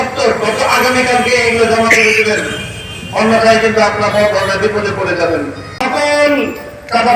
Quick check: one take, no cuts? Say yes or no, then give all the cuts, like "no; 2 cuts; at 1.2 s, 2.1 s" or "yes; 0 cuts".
no; 1 cut; at 5.8 s